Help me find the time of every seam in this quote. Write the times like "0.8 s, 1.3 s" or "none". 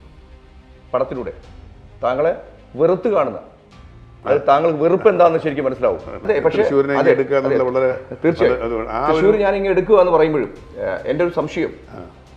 6.1 s